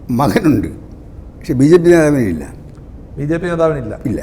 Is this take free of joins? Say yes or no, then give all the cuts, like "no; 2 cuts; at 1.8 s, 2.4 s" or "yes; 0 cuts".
yes; 0 cuts